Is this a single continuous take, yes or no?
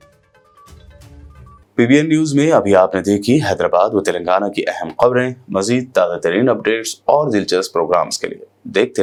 yes